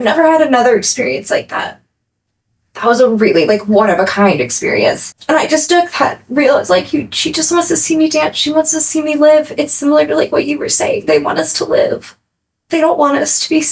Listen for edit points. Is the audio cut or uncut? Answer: cut